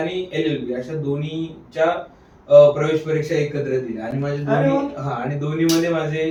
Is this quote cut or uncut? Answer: uncut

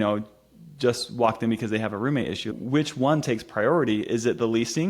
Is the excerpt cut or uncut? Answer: cut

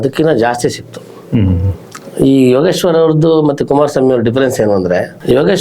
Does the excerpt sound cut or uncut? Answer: uncut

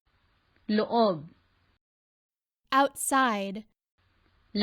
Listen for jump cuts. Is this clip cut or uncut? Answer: cut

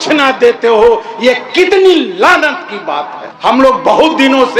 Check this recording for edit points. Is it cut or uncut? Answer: uncut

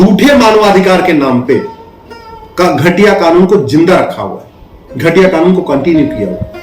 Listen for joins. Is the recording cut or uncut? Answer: uncut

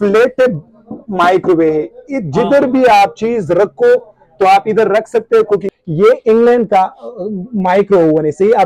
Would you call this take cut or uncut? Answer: cut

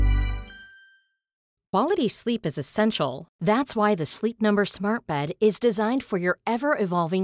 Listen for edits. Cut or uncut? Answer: cut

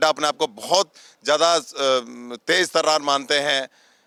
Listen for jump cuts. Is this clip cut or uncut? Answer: uncut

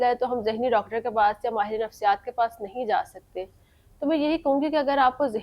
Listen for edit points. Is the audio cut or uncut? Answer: uncut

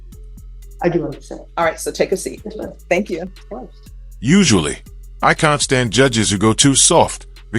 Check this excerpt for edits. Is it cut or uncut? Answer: uncut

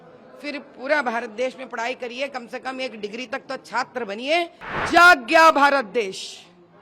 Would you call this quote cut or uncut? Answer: cut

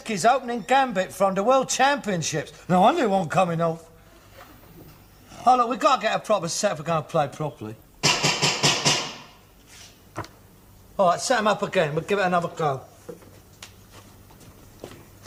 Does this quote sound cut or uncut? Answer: uncut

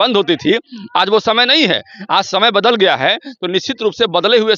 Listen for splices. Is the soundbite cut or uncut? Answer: uncut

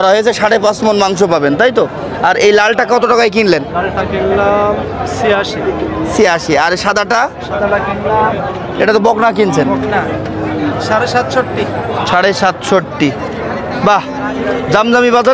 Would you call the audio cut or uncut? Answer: uncut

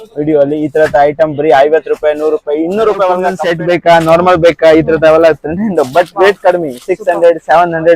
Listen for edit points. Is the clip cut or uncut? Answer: cut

